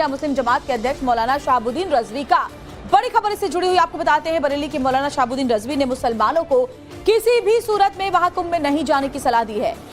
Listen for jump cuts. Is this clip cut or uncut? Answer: cut